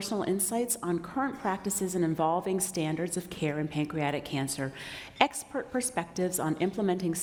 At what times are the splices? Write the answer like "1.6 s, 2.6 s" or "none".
none